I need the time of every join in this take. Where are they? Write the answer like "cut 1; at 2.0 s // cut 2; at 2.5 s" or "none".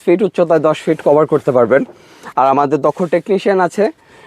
none